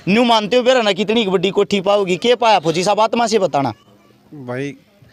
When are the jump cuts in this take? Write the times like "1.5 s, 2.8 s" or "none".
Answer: none